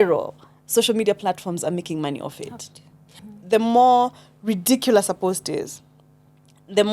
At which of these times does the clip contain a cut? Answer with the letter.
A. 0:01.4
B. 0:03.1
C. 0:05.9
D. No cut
B